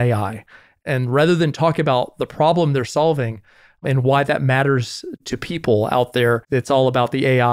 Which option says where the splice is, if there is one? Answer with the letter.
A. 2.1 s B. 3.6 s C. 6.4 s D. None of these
C